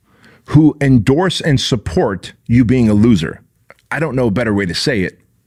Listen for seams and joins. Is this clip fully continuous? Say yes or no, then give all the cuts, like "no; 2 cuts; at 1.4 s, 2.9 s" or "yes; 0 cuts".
yes; 0 cuts